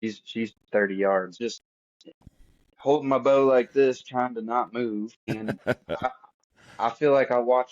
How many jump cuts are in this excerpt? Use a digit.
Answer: 2